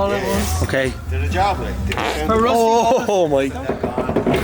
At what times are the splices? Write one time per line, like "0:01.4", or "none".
0:03.6